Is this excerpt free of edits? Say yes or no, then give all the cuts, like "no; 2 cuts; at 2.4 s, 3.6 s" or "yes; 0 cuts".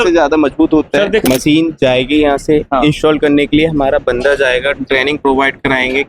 no; 1 cut; at 1.2 s